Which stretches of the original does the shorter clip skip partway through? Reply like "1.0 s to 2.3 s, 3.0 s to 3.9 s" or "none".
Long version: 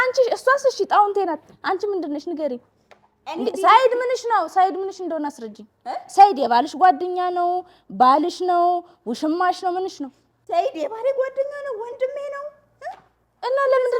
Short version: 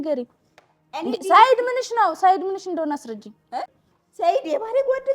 6.0 s to 10.0 s